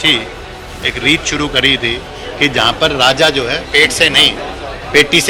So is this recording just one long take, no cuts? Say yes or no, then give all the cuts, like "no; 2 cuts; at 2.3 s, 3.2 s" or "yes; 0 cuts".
yes; 0 cuts